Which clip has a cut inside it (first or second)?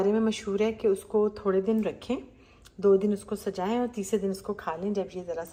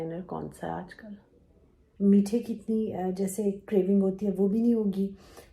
second